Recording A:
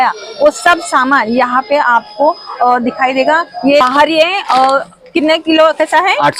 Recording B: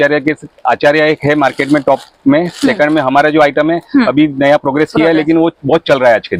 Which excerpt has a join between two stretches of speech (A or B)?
A